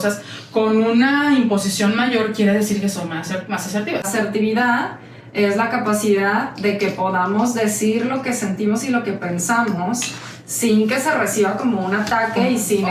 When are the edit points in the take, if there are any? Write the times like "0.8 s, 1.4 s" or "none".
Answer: 4.1 s